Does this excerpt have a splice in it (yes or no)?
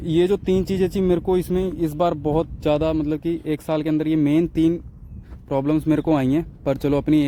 no